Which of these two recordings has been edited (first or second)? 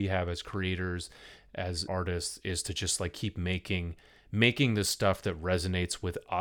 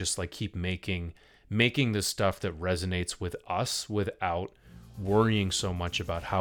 first